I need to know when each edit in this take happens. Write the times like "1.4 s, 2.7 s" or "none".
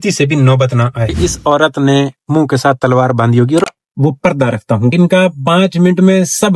1.1 s, 3.7 s